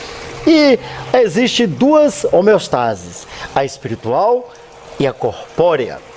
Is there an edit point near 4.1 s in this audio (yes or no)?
no